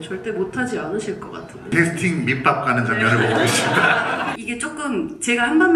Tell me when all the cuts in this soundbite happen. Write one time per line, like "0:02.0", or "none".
0:01.7
0:04.4